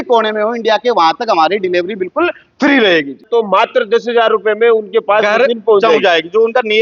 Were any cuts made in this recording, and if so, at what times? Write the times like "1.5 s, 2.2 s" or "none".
3.2 s